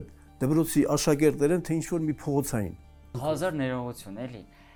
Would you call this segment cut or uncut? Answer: uncut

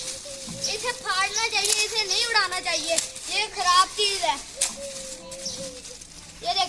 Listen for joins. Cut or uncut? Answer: uncut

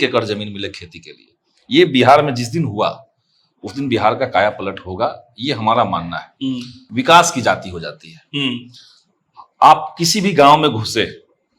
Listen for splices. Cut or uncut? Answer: cut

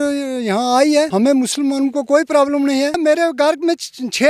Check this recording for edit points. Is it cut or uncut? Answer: cut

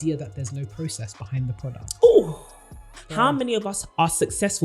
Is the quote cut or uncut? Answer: cut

